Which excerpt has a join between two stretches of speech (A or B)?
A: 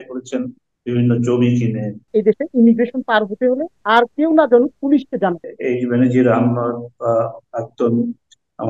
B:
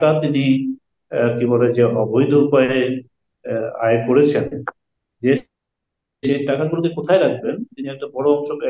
A